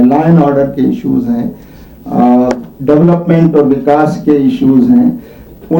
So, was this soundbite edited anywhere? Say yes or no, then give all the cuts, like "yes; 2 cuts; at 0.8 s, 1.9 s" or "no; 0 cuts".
no; 0 cuts